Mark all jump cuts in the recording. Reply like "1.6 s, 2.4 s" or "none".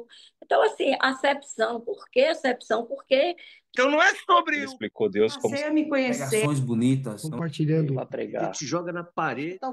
3.6 s